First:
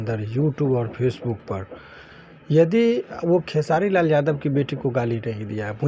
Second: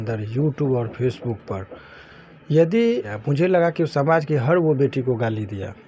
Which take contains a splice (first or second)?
second